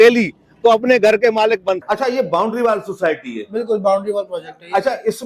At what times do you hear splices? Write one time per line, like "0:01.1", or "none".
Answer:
0:01.8